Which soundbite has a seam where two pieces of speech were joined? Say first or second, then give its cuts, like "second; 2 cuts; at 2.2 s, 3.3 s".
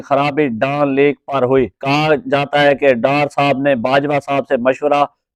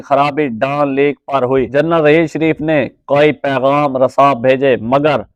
second; 1 cut; at 1.7 s